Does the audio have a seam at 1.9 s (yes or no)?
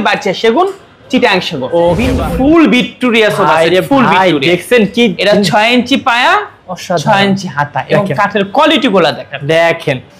yes